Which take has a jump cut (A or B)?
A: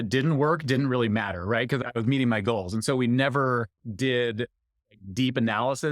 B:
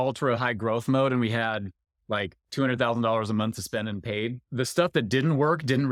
A